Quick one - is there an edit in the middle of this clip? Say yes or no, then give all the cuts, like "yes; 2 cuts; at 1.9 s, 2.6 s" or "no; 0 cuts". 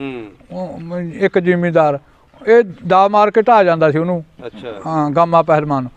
no; 0 cuts